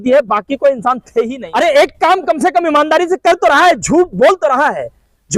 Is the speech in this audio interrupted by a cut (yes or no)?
yes